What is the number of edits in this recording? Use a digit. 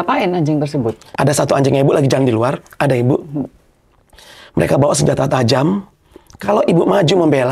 1